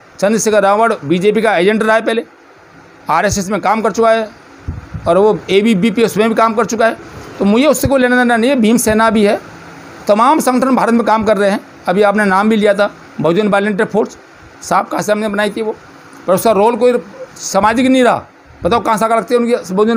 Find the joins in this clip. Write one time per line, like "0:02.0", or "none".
none